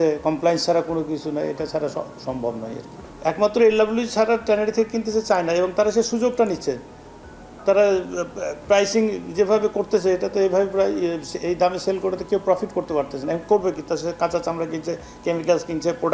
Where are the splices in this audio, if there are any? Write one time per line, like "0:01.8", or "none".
none